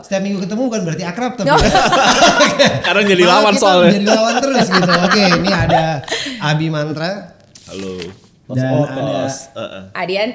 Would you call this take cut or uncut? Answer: uncut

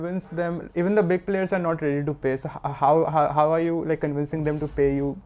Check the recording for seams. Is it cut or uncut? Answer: uncut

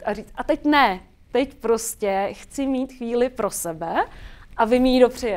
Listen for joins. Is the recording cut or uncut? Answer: uncut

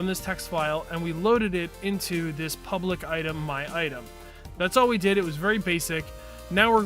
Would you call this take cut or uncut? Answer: cut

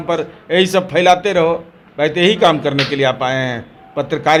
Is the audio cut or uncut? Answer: uncut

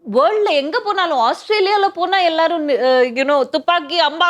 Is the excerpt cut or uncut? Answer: uncut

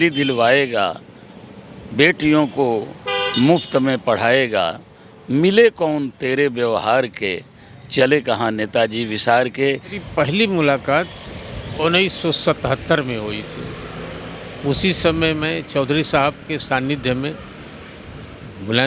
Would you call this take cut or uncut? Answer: cut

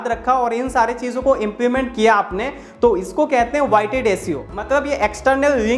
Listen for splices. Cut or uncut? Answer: cut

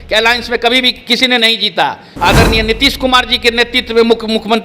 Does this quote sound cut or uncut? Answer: cut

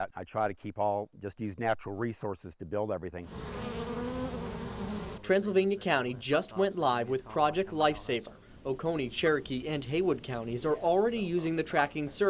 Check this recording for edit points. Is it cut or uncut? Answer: cut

